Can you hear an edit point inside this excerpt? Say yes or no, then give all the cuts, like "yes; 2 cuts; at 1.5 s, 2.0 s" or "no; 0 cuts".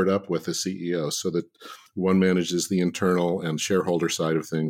no; 0 cuts